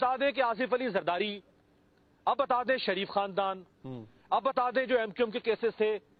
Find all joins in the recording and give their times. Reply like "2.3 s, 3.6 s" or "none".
none